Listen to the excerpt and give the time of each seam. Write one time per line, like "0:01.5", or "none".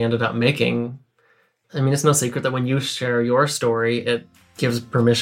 0:01.5